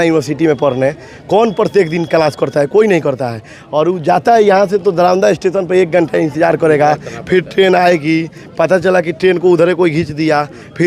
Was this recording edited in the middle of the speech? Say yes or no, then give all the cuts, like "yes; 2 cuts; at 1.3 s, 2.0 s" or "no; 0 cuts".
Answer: no; 0 cuts